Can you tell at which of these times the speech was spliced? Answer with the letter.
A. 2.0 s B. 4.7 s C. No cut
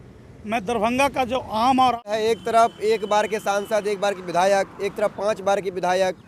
A